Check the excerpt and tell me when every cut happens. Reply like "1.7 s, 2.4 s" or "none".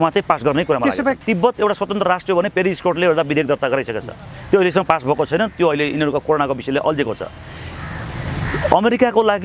1.2 s